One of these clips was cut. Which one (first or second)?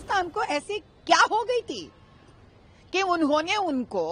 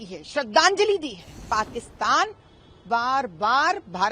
second